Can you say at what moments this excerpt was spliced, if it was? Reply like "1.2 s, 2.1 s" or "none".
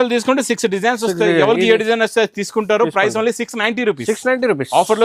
none